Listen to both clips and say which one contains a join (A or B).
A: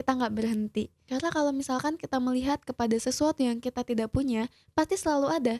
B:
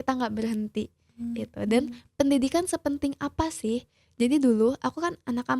A